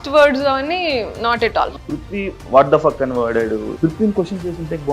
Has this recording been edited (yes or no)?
yes